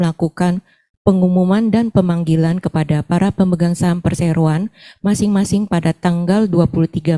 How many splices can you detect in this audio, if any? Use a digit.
0